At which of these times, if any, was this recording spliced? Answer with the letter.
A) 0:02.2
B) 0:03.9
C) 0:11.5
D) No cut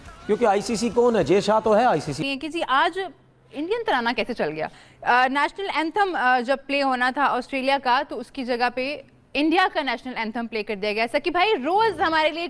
A